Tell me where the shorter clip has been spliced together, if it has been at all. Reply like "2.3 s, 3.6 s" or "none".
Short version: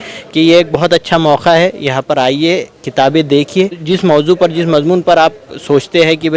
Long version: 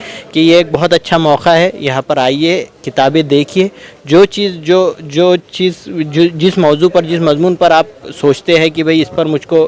3.8 s